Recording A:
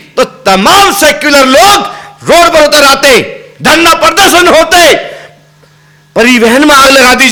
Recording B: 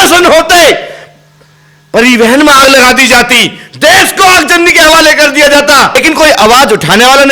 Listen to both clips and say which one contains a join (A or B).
B